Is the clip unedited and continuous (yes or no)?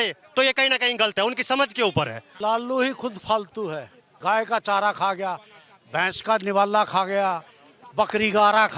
no